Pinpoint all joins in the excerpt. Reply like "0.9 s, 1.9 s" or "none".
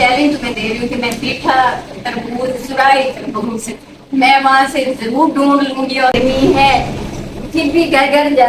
6.1 s